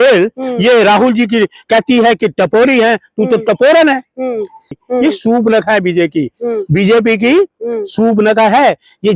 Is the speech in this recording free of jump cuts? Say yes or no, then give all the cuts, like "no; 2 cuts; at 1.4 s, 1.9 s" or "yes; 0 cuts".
no; 1 cut; at 4.7 s